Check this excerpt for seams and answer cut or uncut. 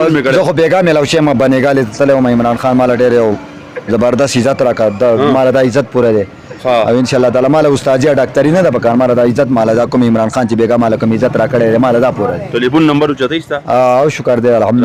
uncut